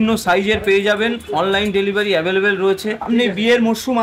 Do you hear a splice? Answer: yes; 1 cut; at 3.1 s

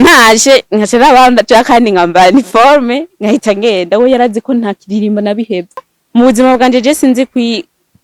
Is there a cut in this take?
yes; 1 cut; at 5.9 s

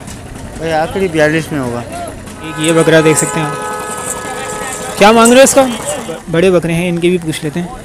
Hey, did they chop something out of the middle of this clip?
yes; 2 cuts; at 2.5 s, 6.2 s

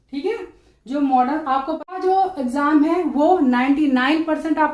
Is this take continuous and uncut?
no; 1 cut; at 1.9 s

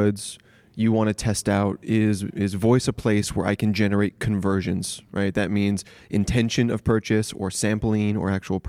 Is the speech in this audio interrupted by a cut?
no; 0 cuts

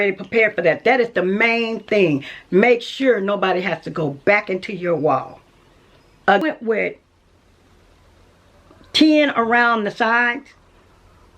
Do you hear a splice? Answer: yes; 1 cut; at 6.4 s

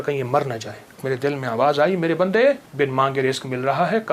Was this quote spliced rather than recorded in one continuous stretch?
yes; 2 cuts; at 1.0 s, 2.7 s

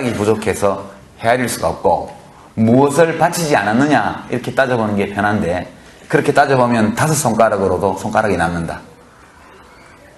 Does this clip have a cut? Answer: no; 0 cuts

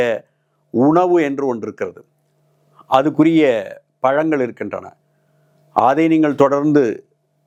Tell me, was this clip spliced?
no; 0 cuts

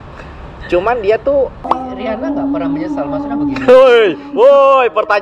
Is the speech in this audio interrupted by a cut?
yes; 1 cut; at 1.7 s

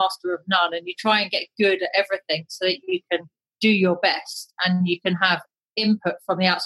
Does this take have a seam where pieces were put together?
no; 0 cuts

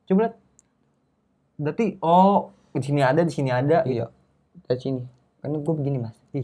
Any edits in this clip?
no; 0 cuts

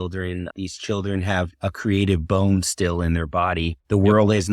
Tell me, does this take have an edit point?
no; 0 cuts

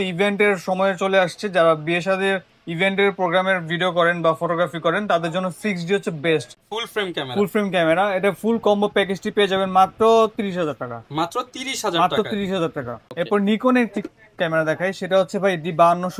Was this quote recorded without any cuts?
yes; 0 cuts

